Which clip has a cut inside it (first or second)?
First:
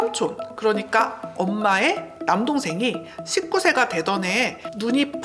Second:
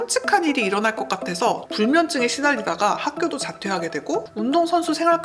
second